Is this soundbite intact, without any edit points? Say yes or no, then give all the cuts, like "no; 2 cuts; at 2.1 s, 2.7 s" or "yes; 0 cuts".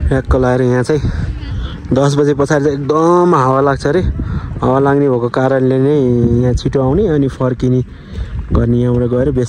yes; 0 cuts